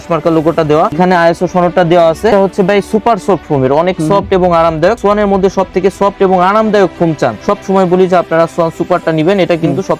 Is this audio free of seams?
no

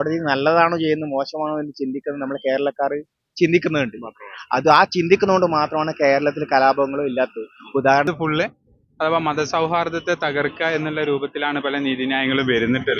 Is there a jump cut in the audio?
yes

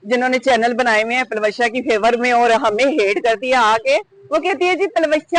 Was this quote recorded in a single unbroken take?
yes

